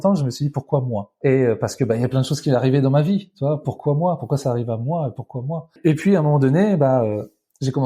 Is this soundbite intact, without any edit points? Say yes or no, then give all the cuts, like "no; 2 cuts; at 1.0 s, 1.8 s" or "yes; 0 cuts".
no; 2 cuts; at 1.1 s, 5.7 s